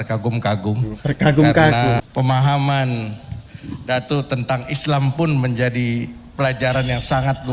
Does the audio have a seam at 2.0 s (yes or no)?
yes